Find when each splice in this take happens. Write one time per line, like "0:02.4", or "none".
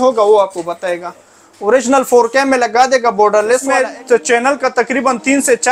0:03.7